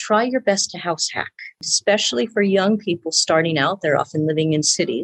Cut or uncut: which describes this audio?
cut